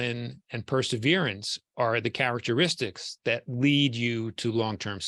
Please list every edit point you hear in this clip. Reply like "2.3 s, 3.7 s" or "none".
none